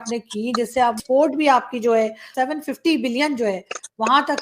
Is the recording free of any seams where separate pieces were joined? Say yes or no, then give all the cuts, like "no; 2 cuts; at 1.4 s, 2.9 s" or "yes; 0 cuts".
no; 2 cuts; at 1.0 s, 2.3 s